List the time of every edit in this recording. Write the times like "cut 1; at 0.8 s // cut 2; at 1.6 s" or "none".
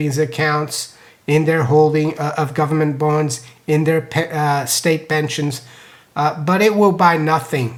none

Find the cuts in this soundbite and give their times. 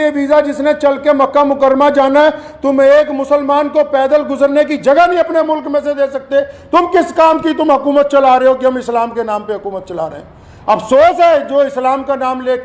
none

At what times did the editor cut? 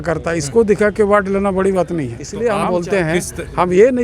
cut 1; at 2.2 s

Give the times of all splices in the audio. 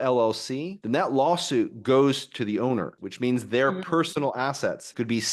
cut 1; at 2.9 s

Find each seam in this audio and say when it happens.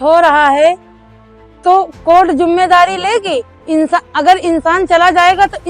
none

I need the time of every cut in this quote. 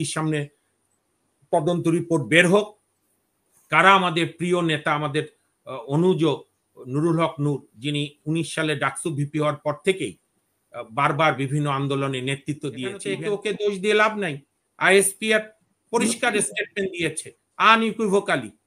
cut 1; at 13.1 s

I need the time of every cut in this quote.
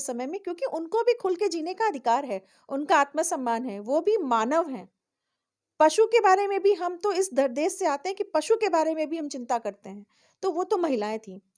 none

